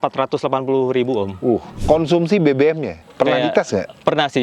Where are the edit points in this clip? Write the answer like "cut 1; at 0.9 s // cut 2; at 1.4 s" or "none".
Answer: cut 1; at 1.7 s // cut 2; at 3.0 s